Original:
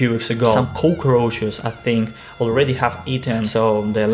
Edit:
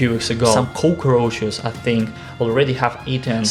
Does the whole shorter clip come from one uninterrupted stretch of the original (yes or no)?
yes